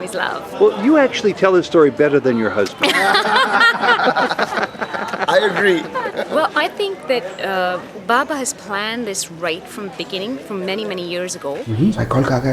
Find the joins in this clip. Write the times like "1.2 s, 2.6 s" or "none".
6.2 s, 11.7 s